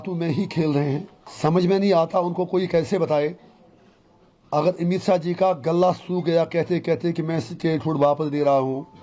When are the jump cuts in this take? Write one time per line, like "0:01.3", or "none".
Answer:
0:01.2